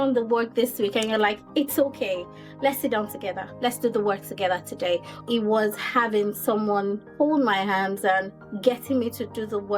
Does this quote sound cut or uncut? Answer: cut